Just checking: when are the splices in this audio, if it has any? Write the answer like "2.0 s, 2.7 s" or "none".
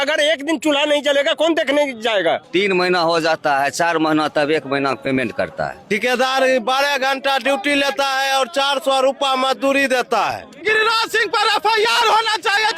2.4 s, 5.8 s, 10.6 s